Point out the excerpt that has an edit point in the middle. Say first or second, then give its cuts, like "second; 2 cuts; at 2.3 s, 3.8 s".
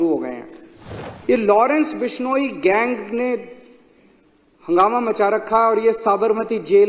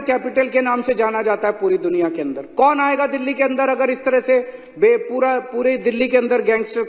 first; 1 cut; at 1.1 s